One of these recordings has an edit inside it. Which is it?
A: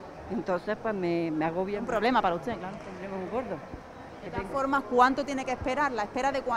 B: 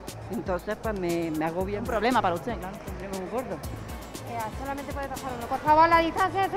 B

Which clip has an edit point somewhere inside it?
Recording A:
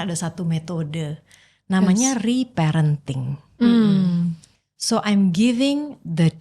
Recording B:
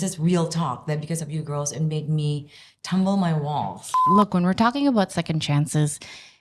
B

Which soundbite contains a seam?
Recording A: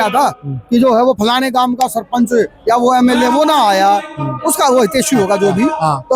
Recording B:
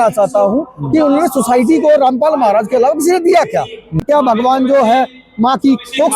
B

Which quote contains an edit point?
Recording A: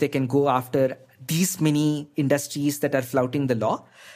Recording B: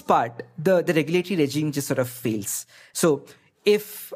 B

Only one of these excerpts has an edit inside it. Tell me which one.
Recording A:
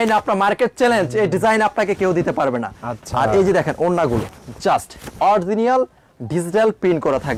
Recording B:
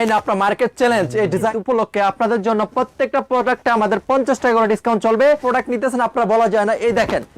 B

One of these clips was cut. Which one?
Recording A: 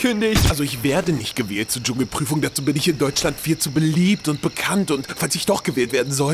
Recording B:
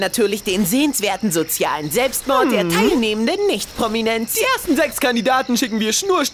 B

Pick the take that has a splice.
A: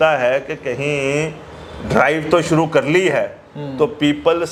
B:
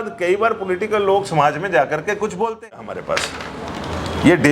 B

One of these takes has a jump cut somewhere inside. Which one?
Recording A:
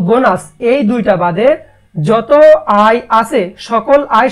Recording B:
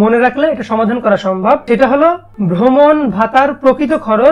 B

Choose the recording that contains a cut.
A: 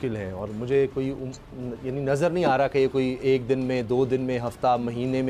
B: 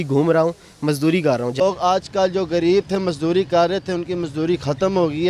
B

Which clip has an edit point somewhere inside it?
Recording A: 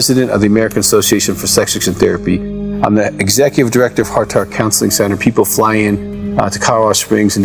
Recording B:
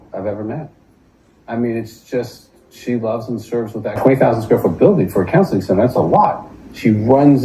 B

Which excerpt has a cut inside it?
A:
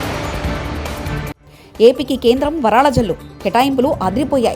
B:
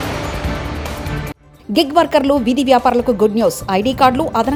A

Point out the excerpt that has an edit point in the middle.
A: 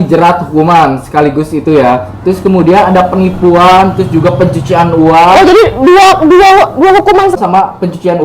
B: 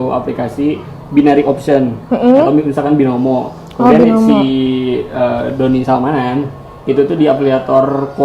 A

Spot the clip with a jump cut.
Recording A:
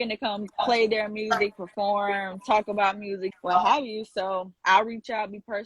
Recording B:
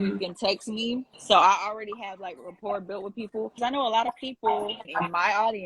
B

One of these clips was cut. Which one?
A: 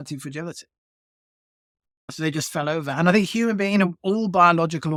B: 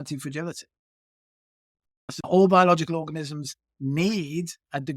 B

